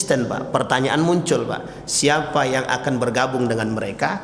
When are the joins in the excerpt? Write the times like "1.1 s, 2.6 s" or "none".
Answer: none

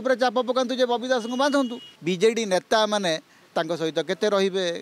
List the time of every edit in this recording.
1.9 s

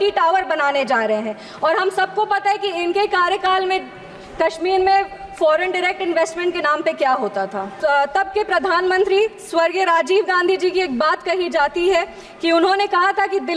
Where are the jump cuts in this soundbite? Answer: 7.7 s

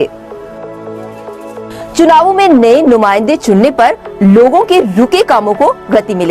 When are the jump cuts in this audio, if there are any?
4.4 s

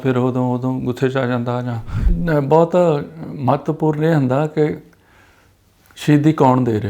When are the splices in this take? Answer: 2.1 s

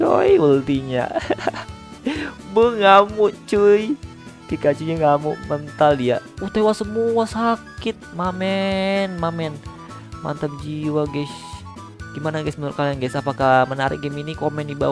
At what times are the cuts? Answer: none

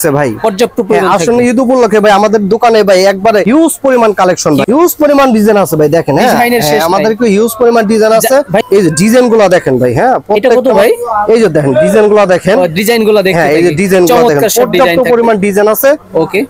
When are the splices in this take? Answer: 3.4 s, 4.6 s, 8.6 s

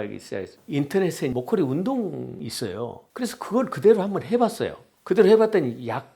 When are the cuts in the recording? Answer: 1.3 s, 2.4 s

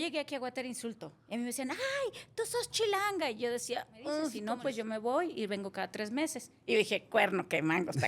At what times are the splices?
4.4 s

